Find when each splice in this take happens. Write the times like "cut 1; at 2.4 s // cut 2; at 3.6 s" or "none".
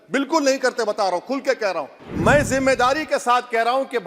cut 1; at 2.0 s